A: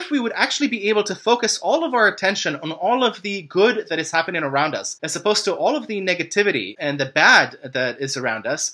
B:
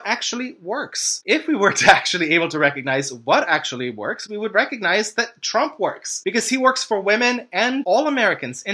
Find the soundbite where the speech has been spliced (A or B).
B